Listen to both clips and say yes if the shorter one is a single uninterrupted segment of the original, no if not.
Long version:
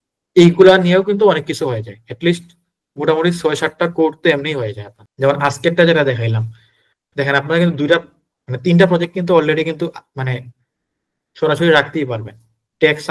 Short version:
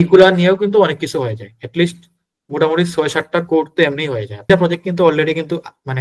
no